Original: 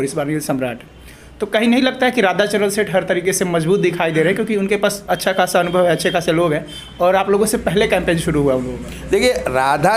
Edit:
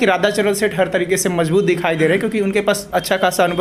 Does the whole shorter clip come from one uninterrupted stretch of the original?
yes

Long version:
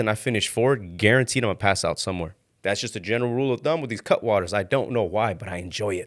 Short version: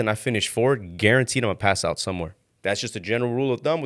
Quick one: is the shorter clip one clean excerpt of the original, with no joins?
yes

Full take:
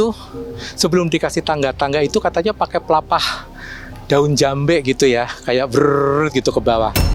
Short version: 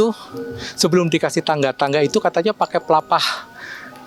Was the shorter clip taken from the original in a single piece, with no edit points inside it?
yes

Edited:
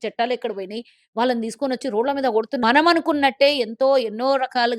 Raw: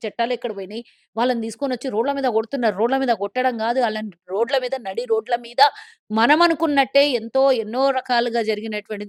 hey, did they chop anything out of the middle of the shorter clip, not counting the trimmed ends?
yes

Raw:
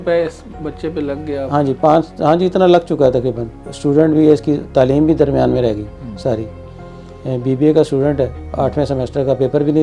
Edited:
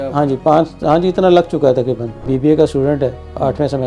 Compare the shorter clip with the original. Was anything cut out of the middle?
yes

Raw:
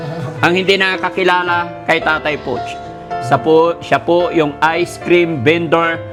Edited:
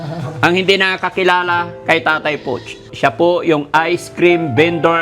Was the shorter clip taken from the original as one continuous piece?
no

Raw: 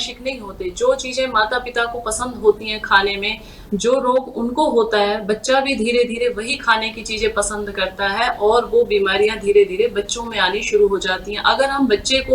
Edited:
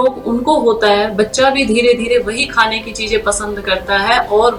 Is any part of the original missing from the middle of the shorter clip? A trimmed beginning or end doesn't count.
no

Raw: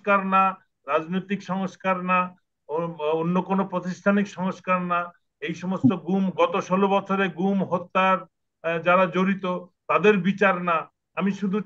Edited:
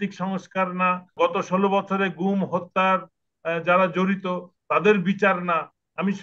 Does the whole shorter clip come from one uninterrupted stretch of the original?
no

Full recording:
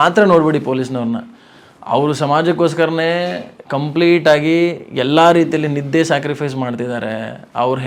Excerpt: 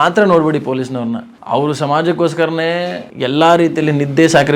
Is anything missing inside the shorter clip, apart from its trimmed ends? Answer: yes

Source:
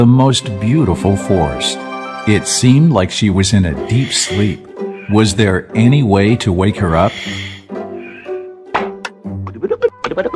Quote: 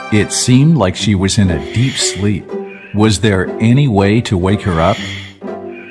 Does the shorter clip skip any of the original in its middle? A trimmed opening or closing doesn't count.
yes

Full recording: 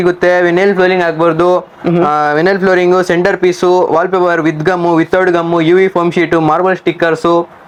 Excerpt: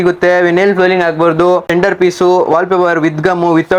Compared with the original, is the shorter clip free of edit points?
no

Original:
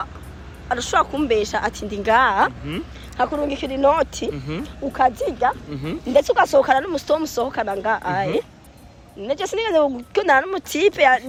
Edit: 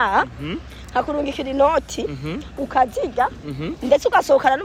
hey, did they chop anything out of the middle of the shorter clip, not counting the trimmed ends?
no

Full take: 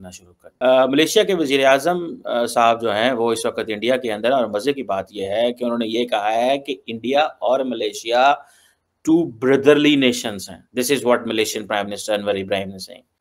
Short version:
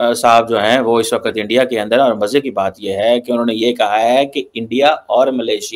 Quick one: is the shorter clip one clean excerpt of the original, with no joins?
yes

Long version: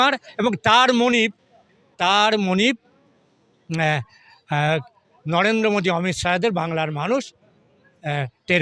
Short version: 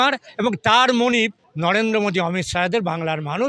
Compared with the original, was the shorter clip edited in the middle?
yes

